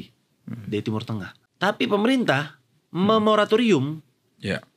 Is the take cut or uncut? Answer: cut